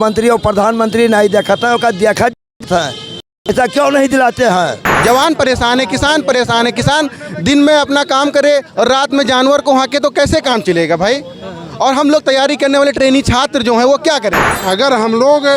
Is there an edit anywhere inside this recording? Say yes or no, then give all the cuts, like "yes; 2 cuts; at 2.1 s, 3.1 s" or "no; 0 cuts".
yes; 2 cuts; at 4.9 s, 14.5 s